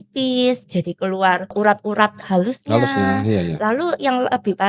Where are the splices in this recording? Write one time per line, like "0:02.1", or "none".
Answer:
0:01.5